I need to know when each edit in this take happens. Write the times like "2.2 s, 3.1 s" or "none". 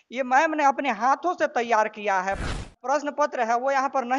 2.5 s